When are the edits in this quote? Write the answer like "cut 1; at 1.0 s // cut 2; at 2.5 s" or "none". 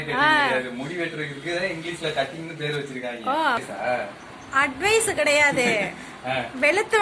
cut 1; at 3.6 s